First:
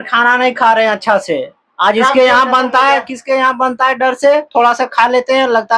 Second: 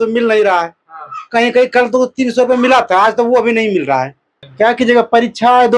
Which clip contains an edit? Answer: second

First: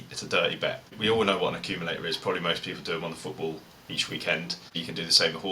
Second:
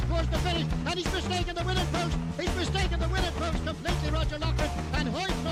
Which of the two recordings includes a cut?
first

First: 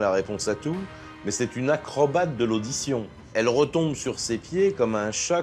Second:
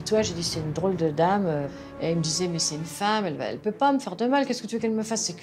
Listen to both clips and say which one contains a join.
first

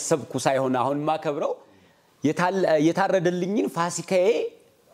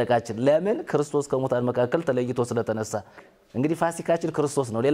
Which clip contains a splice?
second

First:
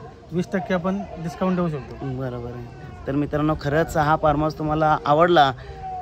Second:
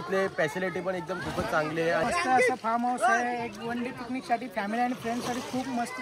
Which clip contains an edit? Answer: second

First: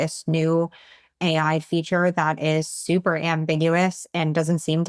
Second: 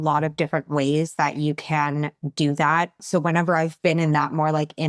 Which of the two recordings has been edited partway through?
second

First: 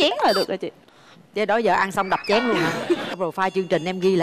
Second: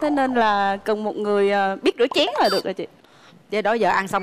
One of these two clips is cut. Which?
first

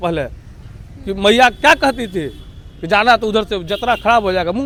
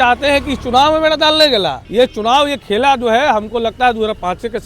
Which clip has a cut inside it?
second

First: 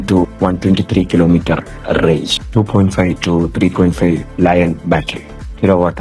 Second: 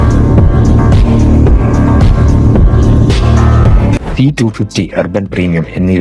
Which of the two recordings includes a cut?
second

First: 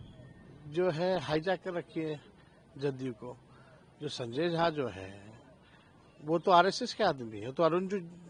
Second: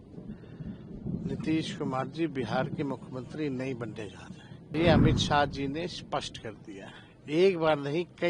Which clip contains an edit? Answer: second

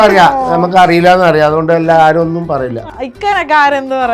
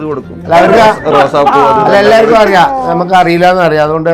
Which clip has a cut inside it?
first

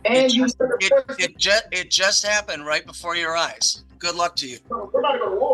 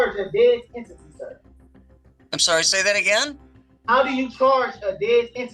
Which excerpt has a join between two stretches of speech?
first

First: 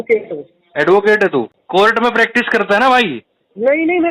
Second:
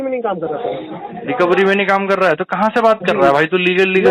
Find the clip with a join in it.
first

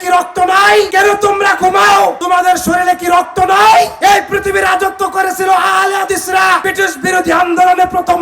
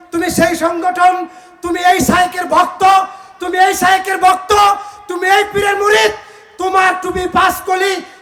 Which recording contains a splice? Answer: first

